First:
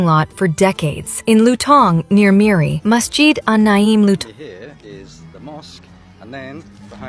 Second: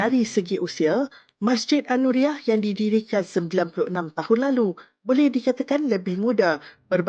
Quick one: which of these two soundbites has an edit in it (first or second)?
first